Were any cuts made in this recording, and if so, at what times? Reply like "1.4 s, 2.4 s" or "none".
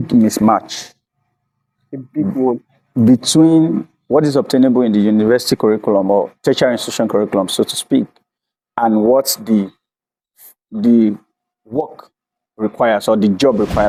none